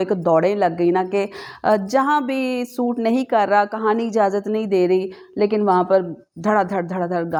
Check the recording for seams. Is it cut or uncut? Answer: uncut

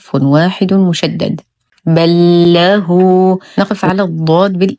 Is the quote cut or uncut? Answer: cut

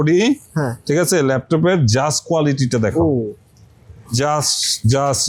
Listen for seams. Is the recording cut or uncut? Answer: uncut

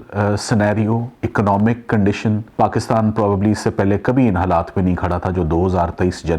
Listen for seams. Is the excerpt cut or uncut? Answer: cut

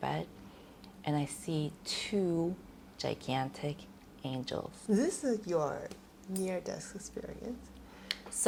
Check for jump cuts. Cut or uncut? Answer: uncut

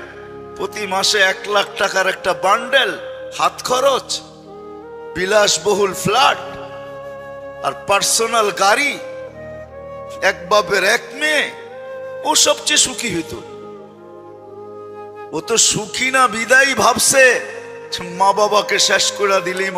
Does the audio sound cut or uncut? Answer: cut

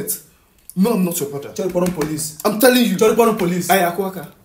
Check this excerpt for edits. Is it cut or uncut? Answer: uncut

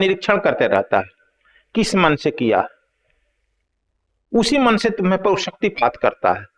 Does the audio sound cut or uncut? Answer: uncut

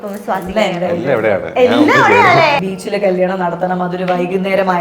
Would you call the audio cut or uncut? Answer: cut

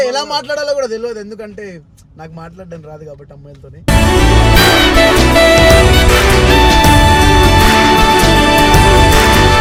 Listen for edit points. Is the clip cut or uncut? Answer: uncut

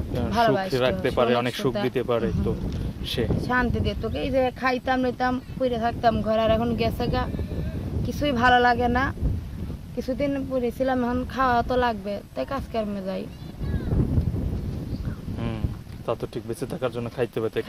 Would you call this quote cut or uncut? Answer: uncut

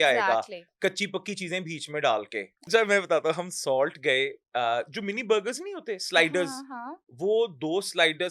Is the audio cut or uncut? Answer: cut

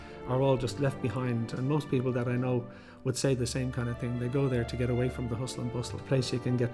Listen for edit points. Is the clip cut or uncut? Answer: uncut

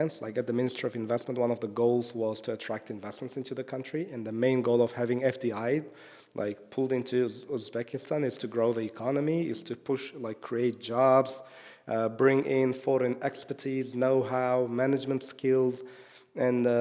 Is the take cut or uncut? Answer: uncut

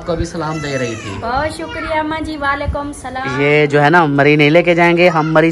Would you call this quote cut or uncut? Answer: cut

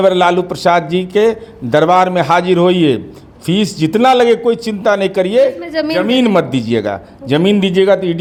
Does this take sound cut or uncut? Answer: uncut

